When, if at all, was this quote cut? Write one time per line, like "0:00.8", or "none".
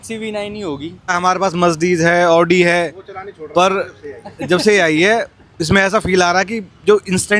0:01.1

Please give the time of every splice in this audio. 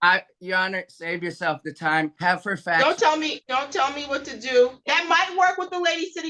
0:02.1
0:03.4
0:04.7

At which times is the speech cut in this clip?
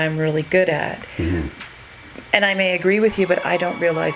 none

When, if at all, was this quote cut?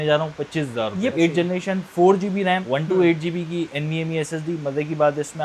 0:01.1

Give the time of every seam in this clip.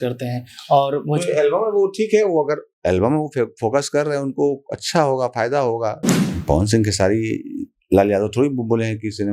0:06.0

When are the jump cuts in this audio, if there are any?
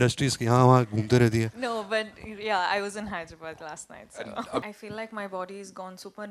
0:04.6

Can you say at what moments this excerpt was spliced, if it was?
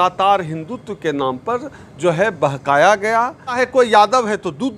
0:03.6

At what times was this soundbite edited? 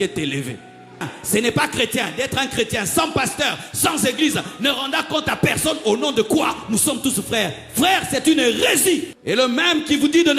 0:01.1
0:09.1

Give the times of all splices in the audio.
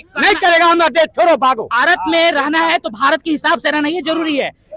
0:01.7

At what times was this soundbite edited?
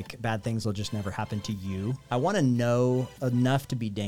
0:02.0
0:03.1

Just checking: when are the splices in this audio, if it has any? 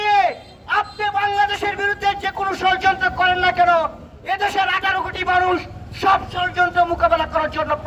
none

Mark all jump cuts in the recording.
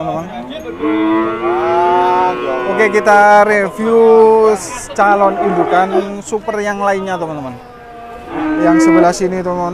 0:08.3

